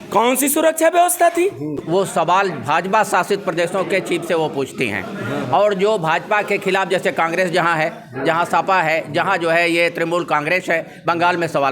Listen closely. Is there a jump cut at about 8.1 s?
no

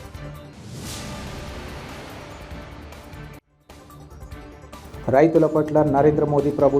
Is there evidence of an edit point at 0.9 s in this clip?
yes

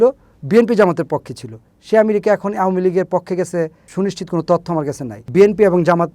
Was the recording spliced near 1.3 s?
no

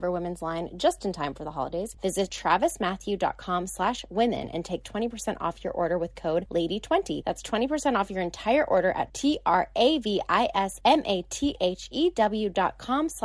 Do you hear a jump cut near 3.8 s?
no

